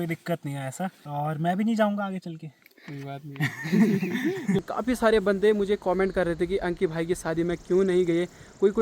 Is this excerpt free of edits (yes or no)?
no